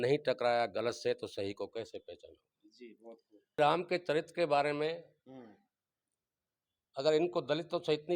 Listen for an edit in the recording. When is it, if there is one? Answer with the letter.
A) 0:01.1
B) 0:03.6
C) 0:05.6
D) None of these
B